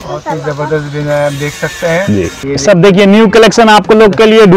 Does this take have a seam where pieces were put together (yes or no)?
yes